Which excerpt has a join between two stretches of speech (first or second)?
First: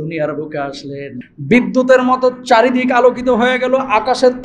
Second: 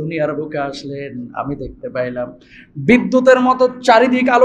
first